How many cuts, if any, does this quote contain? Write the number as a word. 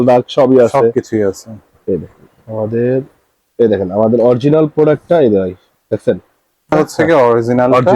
one